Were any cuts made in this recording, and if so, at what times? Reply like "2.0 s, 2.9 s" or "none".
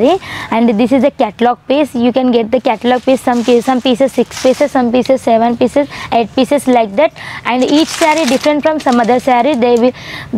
none